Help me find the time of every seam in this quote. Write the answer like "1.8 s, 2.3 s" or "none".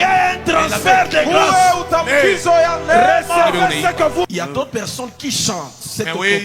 4.3 s